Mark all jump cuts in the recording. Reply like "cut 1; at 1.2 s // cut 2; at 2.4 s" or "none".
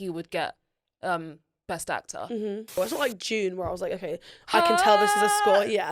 cut 1; at 2.8 s